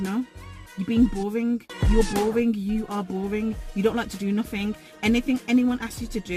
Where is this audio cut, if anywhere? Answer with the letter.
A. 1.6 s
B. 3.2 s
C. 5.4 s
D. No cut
D